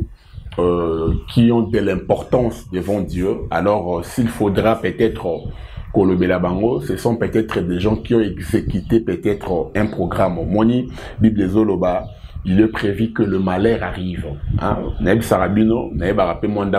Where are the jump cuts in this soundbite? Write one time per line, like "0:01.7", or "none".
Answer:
none